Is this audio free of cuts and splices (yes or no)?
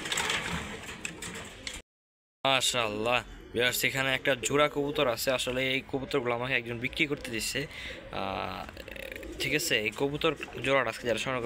yes